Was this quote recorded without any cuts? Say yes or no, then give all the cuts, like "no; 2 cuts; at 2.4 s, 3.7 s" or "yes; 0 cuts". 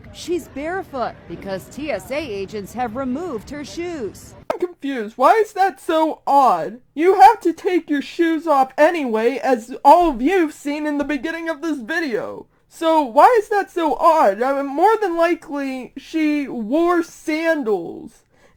yes; 0 cuts